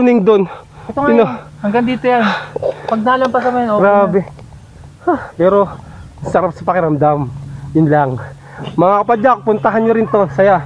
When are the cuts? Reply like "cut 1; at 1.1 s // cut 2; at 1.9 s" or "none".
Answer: none